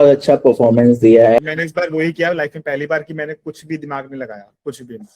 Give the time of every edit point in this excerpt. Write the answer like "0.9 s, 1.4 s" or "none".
1.4 s